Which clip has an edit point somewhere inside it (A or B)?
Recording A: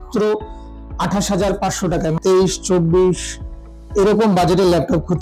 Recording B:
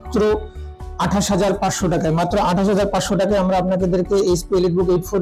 A